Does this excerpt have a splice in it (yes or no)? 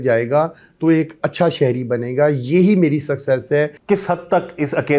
yes